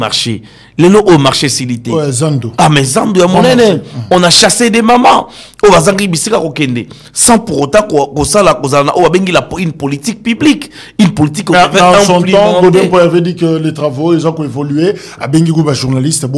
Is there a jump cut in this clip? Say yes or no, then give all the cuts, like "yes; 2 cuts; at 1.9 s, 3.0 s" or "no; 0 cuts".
no; 0 cuts